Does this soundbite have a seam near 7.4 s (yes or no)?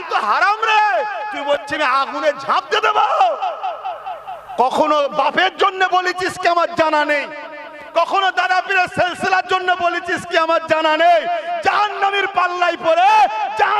no